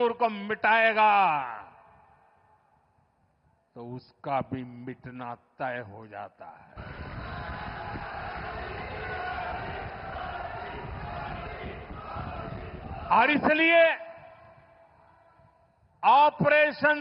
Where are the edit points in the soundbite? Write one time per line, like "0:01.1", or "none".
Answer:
none